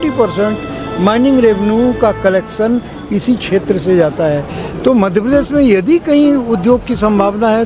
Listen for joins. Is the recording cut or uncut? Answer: uncut